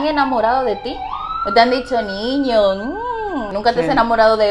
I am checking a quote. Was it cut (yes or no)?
yes